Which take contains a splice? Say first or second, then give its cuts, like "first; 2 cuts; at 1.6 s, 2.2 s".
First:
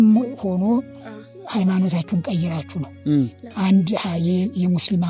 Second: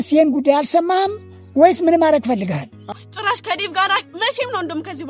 second; 1 cut; at 2.9 s